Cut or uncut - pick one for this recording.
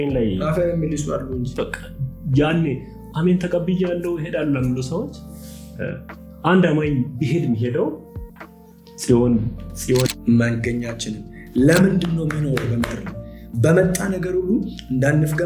cut